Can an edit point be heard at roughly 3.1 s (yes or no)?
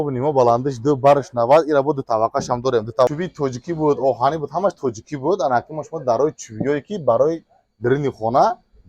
yes